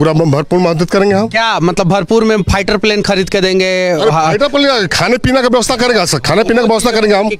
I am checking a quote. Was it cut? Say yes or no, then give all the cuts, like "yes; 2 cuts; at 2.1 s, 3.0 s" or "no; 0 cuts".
no; 0 cuts